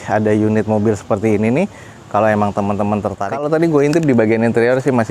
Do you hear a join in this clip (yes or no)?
yes